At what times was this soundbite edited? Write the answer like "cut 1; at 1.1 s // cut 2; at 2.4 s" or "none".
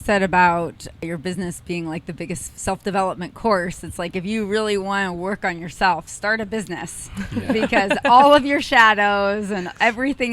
cut 1; at 1.0 s